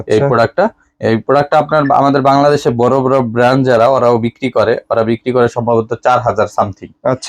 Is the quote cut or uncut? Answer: uncut